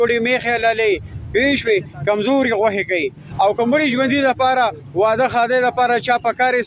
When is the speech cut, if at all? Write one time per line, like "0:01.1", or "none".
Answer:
0:03.2